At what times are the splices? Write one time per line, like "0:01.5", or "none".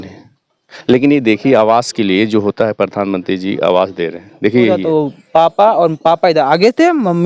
0:04.8